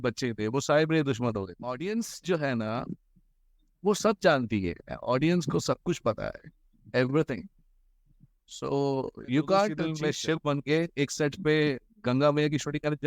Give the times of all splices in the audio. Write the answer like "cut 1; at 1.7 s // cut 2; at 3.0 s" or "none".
cut 1; at 1.6 s // cut 2; at 9.9 s